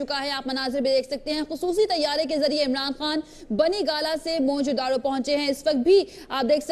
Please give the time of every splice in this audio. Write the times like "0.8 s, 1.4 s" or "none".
none

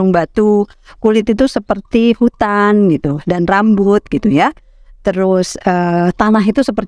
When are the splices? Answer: none

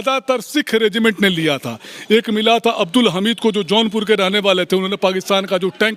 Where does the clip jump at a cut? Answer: none

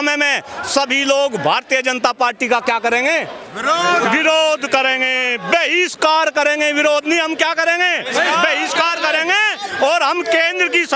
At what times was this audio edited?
none

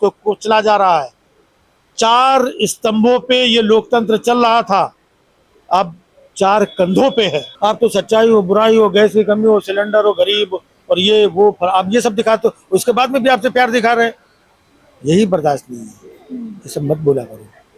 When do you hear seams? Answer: 7.5 s

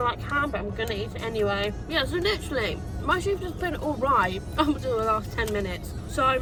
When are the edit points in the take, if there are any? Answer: none

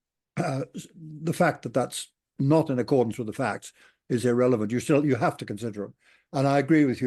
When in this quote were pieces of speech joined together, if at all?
none

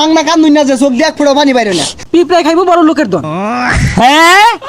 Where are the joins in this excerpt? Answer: 2.0 s

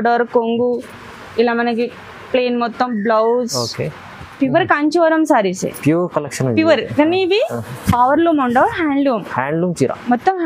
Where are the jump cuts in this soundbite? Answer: 4.3 s

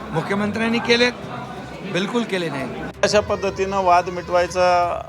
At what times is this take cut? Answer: 2.9 s

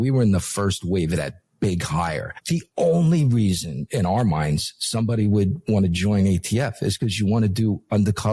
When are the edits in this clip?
2.3 s

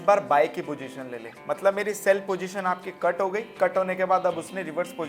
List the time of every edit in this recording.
none

